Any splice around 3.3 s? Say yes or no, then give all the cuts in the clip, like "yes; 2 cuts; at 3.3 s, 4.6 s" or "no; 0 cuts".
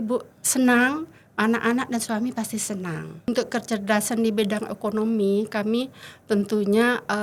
yes; 1 cut; at 3.3 s